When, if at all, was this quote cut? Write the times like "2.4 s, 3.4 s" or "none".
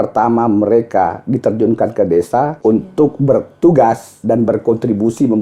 2.5 s, 4.1 s